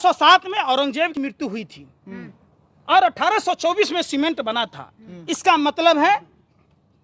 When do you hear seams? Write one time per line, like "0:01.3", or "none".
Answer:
0:01.2